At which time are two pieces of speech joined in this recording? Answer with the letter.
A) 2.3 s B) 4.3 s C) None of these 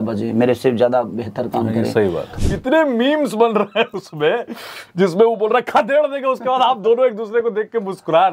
A